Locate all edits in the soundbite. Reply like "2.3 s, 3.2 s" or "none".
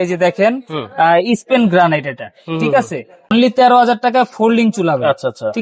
3.3 s